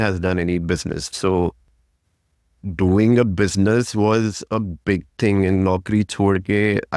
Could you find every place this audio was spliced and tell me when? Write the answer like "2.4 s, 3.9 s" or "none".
1.1 s